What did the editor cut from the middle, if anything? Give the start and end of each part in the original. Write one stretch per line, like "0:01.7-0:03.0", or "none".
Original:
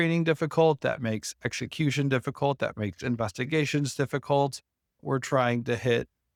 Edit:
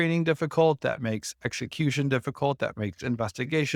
none